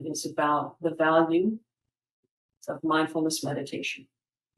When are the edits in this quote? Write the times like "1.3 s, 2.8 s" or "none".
none